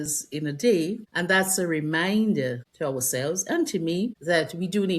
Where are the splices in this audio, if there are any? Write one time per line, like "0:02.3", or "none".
0:01.1
0:02.7
0:04.2